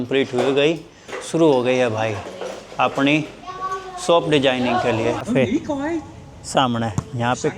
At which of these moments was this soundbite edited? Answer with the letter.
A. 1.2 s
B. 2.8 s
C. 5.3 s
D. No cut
C